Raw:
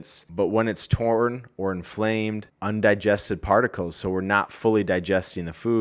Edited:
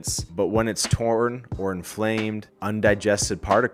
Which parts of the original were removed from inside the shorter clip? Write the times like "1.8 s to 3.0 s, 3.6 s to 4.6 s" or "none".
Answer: none